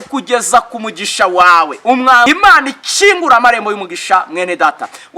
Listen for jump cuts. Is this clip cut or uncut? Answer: cut